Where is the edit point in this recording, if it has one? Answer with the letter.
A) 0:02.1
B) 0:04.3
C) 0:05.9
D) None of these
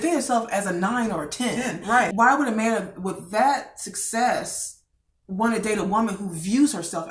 A